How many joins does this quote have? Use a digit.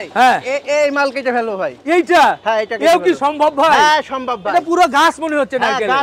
0